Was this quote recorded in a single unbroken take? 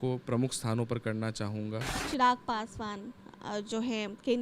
no; 1 cut; at 2.0 s

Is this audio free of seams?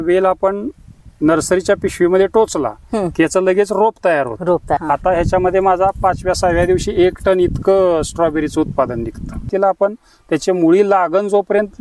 no; 2 cuts; at 4.8 s, 9.5 s

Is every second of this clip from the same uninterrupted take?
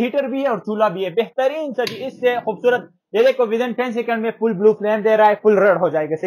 yes; 0 cuts

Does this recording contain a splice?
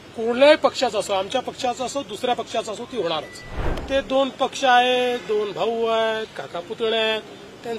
yes; 1 cut; at 3.8 s

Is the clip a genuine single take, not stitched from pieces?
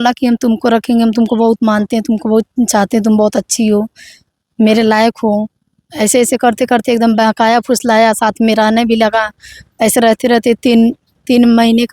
yes; 0 cuts

